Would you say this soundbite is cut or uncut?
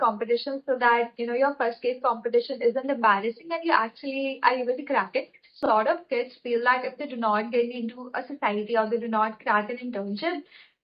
cut